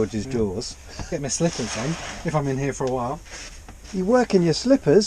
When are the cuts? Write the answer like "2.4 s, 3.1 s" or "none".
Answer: 1.0 s

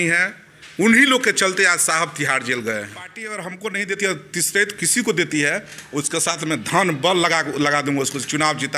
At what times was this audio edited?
3.4 s

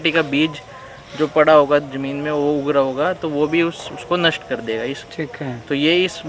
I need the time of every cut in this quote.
none

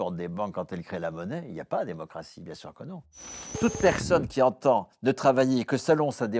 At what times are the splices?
3.4 s

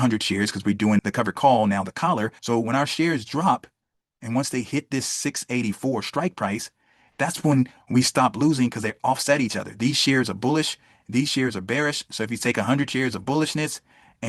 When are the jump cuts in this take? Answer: 1.0 s, 2.3 s

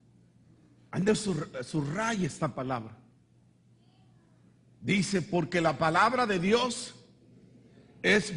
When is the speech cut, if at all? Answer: 1.5 s

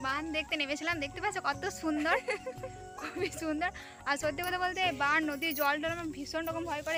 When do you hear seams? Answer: none

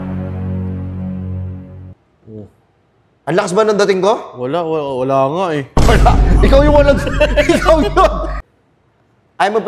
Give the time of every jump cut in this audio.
8.3 s

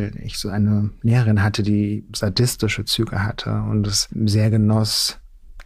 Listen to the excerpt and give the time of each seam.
2.1 s, 4.1 s

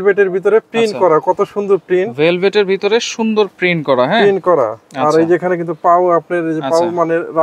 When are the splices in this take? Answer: none

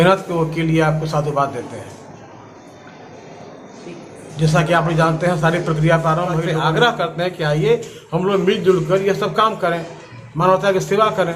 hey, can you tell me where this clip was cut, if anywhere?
6.4 s

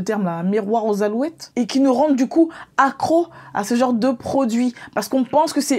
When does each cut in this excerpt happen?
1.5 s

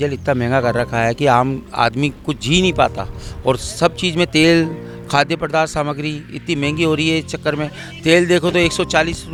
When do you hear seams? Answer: none

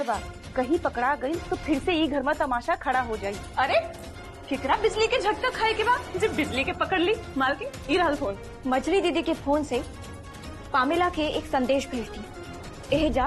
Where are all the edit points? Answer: 8.5 s

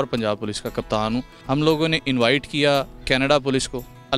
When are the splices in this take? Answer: 1.3 s

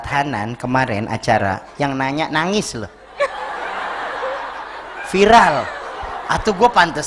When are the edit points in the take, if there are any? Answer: none

